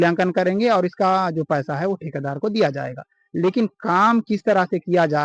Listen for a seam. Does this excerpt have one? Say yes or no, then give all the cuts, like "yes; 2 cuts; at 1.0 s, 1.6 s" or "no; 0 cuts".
no; 0 cuts